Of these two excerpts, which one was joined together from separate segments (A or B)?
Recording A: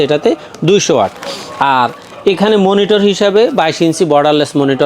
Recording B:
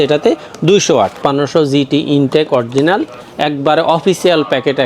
B